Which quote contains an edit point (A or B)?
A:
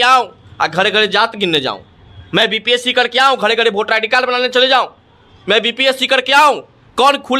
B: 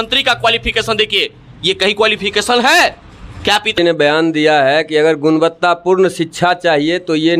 B